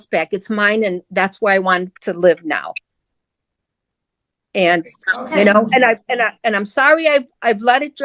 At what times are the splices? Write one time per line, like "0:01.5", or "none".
none